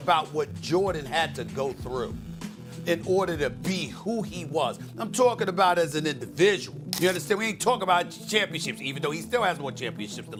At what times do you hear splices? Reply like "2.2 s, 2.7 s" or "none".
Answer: none

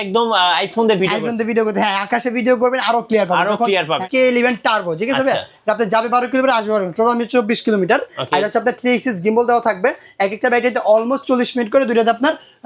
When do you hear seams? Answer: 4.1 s

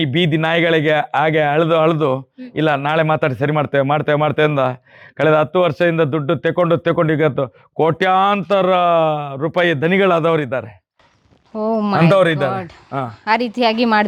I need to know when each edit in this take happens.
none

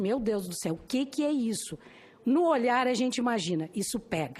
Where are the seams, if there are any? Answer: none

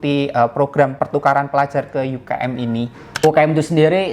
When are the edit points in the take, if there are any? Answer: 1.0 s, 3.0 s

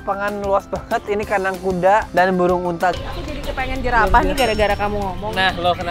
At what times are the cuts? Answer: 2.9 s

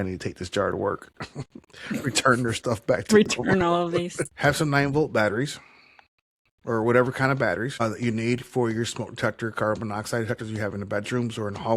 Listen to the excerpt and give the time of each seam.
4.2 s, 7.7 s

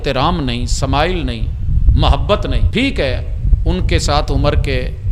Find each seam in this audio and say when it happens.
2.6 s

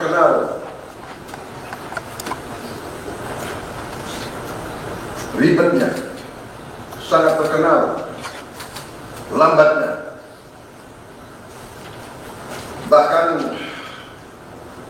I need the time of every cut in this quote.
3.5 s

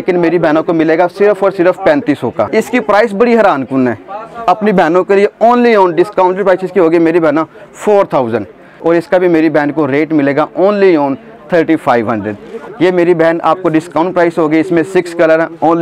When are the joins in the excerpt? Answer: 2.4 s, 8.7 s, 12.5 s

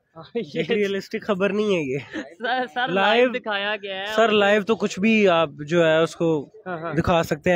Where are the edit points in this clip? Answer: none

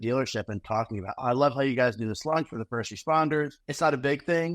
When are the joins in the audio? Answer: 3.6 s

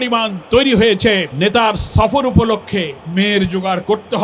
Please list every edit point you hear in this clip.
1.3 s, 3.0 s

